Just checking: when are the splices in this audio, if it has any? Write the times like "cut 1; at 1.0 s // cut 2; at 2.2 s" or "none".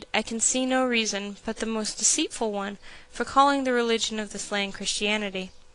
cut 1; at 2.1 s